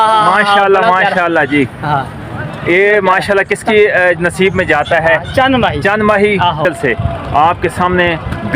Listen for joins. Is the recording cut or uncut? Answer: cut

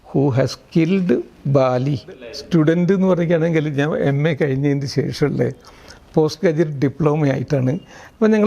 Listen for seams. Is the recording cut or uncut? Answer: cut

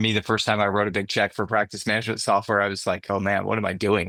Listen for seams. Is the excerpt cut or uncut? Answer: uncut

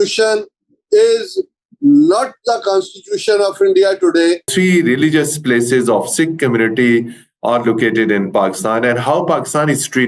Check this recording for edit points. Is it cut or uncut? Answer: cut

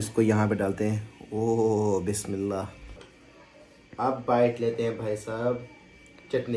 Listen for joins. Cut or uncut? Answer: uncut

